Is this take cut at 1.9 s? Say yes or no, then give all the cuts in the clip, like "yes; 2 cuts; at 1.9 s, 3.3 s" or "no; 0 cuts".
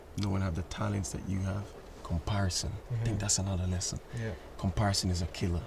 yes; 1 cut; at 1.9 s